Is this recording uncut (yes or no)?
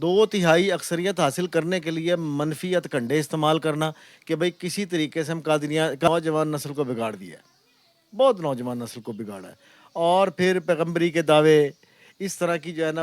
no